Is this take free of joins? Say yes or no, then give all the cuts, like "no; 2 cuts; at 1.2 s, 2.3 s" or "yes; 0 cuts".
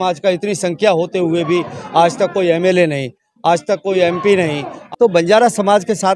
no; 1 cut; at 4.8 s